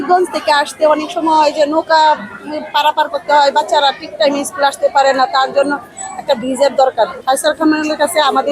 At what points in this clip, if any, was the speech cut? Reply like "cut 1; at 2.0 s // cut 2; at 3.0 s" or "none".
cut 1; at 7.2 s

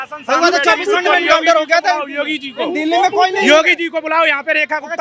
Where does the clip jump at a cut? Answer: none

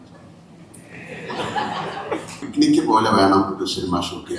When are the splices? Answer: cut 1; at 2.4 s

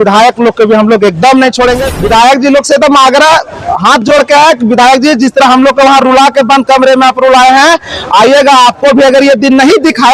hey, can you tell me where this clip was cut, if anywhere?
cut 1; at 1.9 s

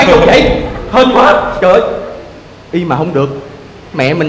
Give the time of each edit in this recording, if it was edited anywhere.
none

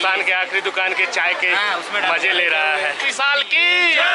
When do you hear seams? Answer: cut 1; at 3.1 s

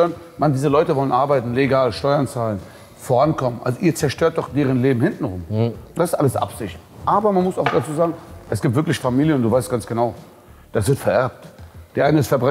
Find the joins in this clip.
none

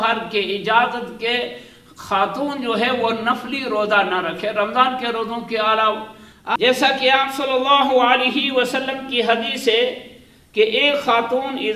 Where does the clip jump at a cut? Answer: cut 1; at 6.6 s

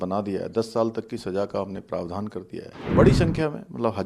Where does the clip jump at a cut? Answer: cut 1; at 2.8 s

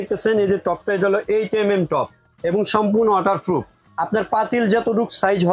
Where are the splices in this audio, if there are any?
cut 1; at 2.2 s // cut 2; at 3.8 s

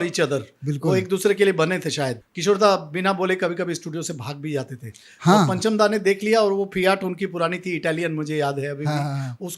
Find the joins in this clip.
cut 1; at 2.2 s

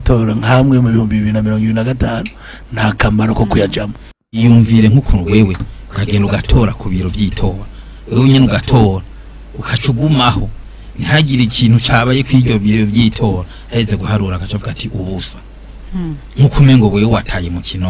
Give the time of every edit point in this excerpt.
cut 1; at 4.4 s

